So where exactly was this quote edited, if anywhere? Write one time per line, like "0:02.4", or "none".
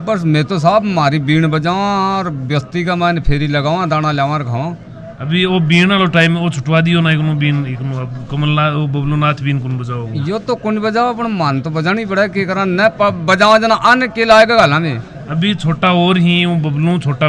none